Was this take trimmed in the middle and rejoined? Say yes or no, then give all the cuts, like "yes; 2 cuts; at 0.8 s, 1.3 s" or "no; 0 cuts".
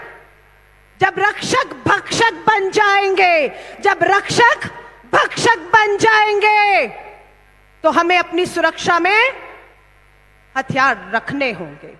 no; 0 cuts